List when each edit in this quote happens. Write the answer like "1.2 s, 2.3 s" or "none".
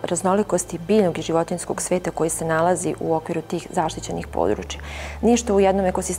5.0 s